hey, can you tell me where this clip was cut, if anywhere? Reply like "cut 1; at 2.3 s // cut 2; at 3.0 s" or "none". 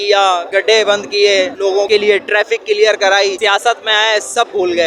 none